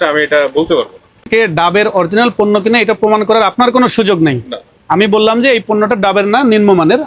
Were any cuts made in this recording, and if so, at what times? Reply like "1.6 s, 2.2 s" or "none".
1.3 s